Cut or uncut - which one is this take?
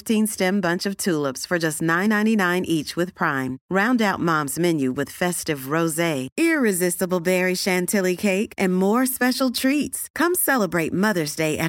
uncut